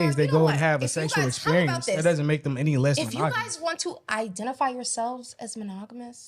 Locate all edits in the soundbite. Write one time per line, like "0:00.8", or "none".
none